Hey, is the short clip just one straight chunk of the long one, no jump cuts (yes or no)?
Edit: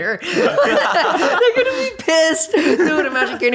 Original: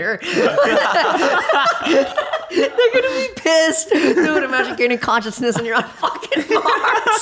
no